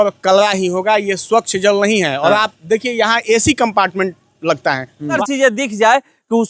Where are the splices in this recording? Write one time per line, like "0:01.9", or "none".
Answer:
0:05.2